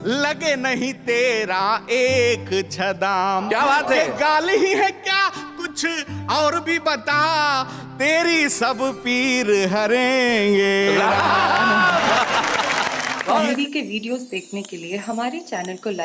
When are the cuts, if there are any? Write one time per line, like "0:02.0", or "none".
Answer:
0:13.4